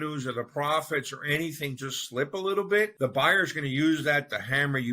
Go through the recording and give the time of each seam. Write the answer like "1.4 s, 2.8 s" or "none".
2.9 s